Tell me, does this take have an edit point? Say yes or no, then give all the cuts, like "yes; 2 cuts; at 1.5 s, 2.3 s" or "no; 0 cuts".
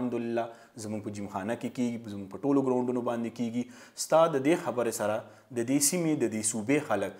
no; 0 cuts